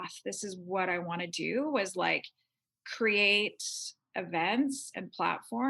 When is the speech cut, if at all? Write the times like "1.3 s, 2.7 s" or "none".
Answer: none